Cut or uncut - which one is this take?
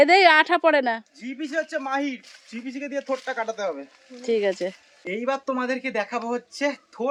uncut